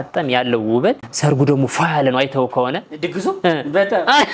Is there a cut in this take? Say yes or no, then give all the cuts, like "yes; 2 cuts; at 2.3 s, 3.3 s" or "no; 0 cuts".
yes; 1 cut; at 1.1 s